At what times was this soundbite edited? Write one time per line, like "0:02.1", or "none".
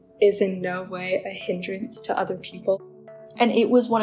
0:03.0